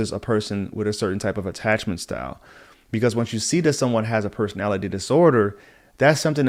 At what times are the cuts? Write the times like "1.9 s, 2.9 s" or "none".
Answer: none